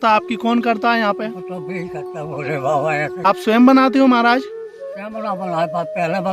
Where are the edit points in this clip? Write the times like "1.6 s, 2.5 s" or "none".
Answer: 3.3 s